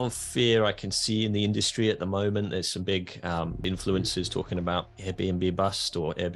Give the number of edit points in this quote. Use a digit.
1